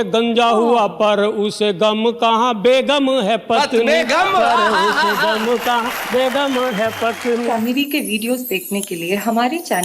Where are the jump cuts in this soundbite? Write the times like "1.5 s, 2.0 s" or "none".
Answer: 7.5 s